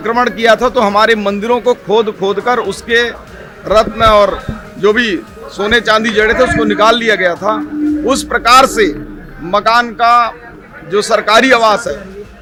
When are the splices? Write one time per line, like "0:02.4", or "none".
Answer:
none